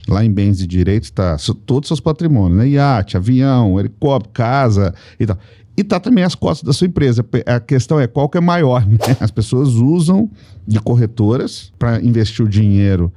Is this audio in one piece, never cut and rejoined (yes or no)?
no